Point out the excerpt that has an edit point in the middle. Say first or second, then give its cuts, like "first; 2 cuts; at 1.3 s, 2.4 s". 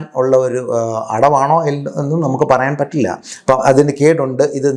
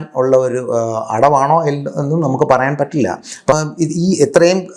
second; 1 cut; at 3.5 s